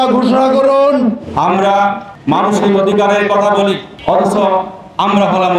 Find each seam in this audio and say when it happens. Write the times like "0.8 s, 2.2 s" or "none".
1.2 s

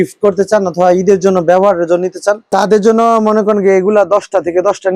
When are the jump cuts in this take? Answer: none

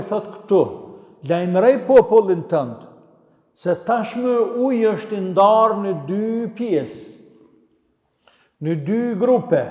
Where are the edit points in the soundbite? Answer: none

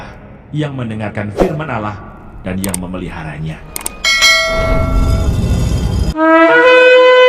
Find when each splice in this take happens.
none

